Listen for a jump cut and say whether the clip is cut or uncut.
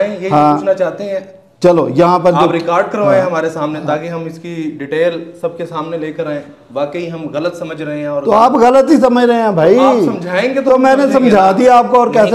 uncut